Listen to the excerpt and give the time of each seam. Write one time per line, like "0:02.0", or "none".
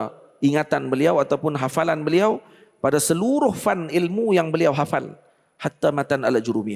none